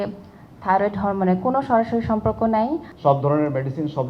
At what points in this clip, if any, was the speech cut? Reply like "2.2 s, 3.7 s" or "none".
2.9 s